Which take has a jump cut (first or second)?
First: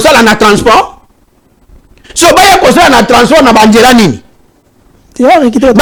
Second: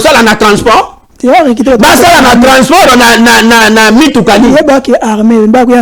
second